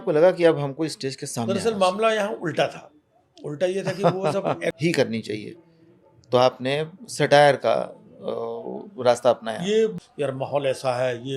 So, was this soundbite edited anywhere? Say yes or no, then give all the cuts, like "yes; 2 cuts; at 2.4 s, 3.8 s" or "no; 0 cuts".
yes; 3 cuts; at 1.5 s, 4.8 s, 10.0 s